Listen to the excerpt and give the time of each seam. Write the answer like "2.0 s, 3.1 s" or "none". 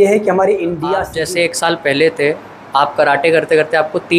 1.1 s